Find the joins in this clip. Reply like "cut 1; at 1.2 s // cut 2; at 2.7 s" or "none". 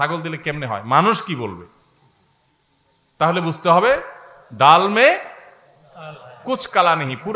none